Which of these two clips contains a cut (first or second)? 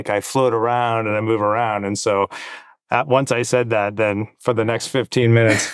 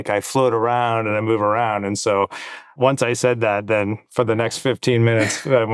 second